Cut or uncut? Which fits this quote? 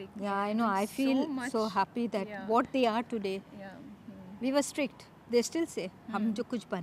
uncut